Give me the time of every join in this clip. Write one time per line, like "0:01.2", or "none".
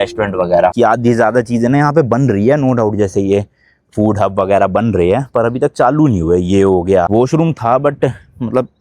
0:00.7
0:07.1